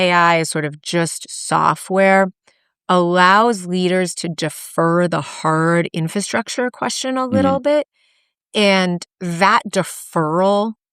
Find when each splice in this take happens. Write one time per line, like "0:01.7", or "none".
none